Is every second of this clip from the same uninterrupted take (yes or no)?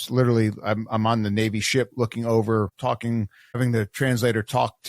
no